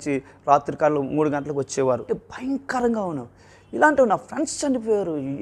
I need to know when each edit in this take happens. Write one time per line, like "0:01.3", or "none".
0:02.0